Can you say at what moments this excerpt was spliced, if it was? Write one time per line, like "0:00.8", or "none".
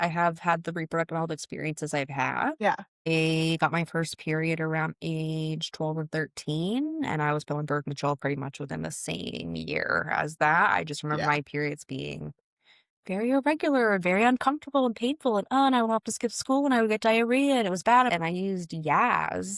0:02.9
0:18.1